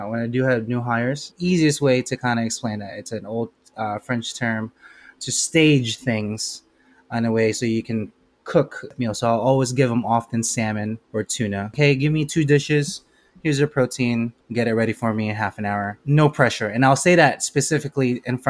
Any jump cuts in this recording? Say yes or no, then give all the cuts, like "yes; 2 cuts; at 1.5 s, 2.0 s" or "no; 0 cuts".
yes; 5 cuts; at 1.3 s, 8.9 s, 11.6 s, 14.4 s, 16.0 s